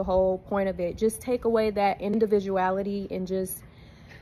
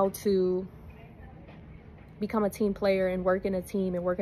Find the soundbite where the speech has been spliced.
first; 1 cut; at 2.1 s

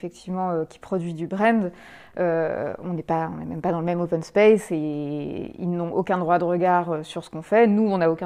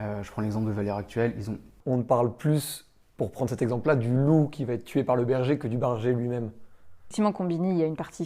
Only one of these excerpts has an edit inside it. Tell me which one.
second; 2 cuts; at 1.7 s, 7.0 s

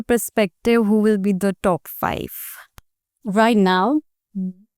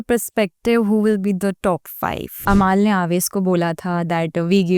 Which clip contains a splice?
second; 1 cut; at 2.4 s

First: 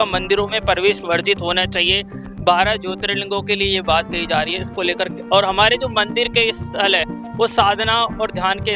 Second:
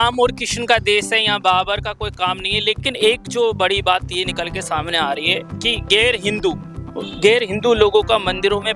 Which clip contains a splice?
second; 1 cut; at 2.9 s

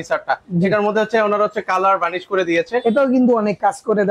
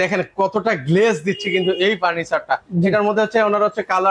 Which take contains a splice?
first; 1 cut; at 2.8 s

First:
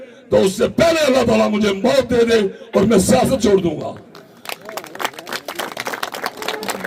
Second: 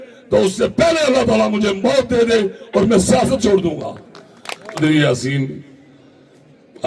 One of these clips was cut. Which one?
second; 1 cut; at 4.8 s

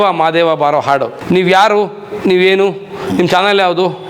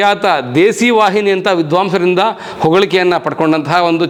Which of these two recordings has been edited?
first; 1 cut; at 1.1 s

